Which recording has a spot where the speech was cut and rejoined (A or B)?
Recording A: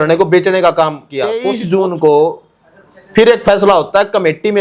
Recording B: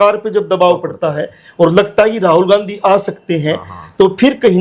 A